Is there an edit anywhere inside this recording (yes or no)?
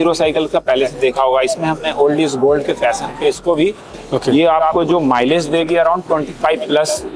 yes